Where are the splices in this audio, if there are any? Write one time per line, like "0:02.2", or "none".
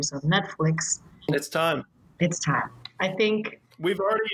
0:01.3